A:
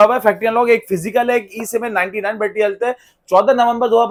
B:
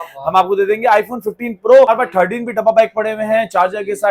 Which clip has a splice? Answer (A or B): B